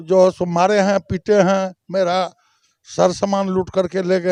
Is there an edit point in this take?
no; 0 cuts

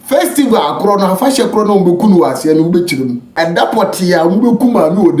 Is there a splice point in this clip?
yes; 1 cut; at 3.3 s

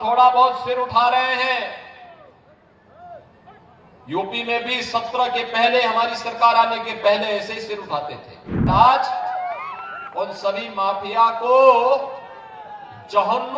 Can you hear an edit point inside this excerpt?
yes; 1 cut; at 8.7 s

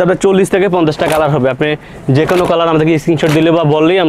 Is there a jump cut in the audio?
no; 0 cuts

